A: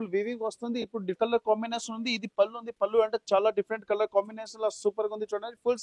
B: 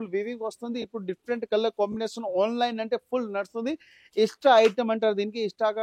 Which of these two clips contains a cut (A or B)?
A